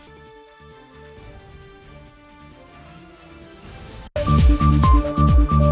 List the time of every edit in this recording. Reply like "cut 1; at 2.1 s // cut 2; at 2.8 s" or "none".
cut 1; at 4.1 s

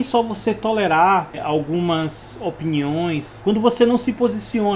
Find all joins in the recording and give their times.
cut 1; at 3.3 s

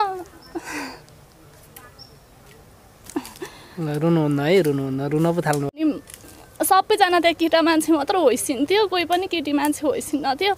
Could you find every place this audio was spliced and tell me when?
cut 1; at 5.8 s

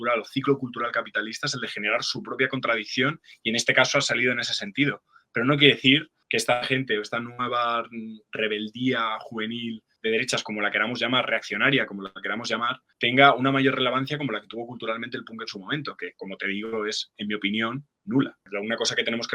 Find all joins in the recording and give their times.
cut 1; at 18.4 s

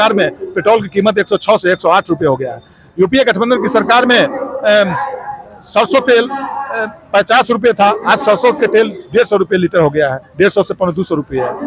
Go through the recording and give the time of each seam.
none

